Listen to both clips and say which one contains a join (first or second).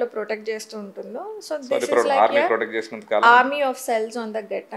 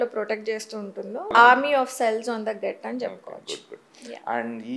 second